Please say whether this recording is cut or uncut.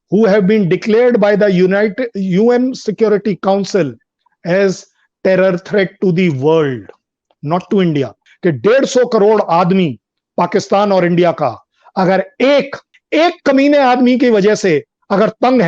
cut